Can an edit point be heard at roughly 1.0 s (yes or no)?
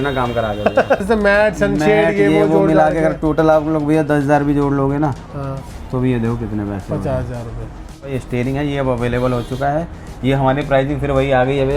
yes